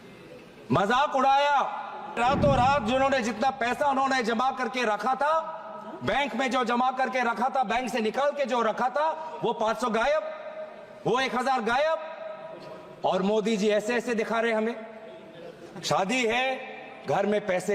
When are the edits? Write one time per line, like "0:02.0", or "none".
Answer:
0:02.2